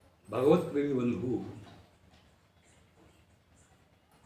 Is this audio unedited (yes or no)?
yes